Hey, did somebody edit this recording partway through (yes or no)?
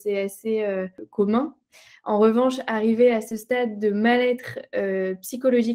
yes